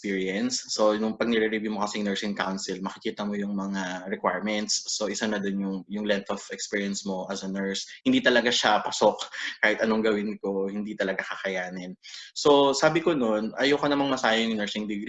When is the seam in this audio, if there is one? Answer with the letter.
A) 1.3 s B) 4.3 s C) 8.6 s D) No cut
D